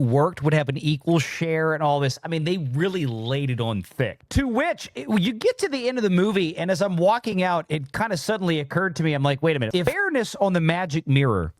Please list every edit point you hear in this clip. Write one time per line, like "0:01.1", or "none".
0:09.7